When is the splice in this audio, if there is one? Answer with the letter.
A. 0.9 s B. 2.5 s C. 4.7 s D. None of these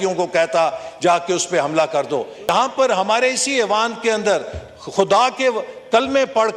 B